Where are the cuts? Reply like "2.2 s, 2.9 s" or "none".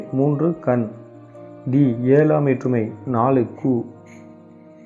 none

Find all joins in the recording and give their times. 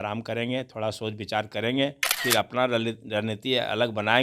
2.1 s

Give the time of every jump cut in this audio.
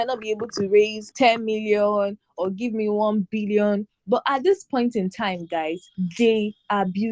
1.0 s, 5.9 s

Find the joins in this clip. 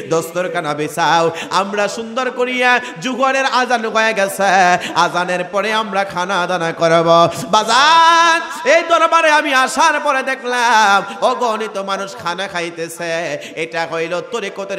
none

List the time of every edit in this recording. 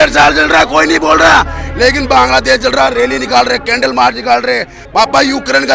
4.8 s

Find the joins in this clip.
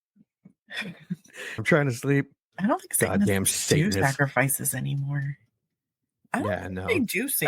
1.6 s, 6.1 s

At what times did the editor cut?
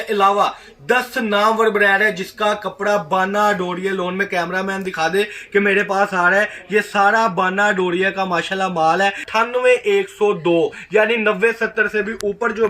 9.2 s

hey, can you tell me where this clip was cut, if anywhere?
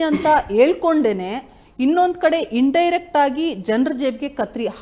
none

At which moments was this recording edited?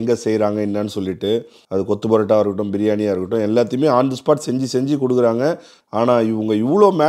1.6 s, 5.7 s

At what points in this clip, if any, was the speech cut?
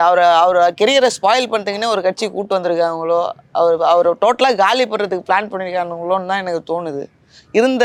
none

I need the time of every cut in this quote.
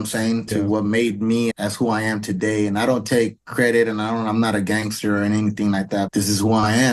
1.5 s, 6.1 s

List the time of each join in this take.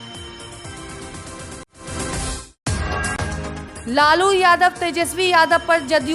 1.6 s, 3.6 s

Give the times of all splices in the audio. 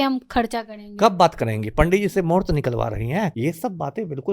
3.3 s

